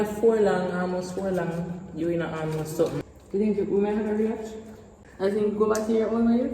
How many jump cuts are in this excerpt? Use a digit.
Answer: 2